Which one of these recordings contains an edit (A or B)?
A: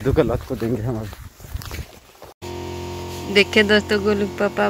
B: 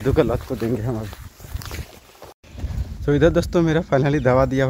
A